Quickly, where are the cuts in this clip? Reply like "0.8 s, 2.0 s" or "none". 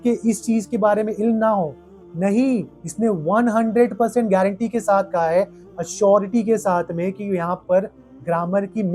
none